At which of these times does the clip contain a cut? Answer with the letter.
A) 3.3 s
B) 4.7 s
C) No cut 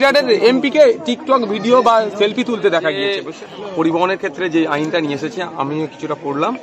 A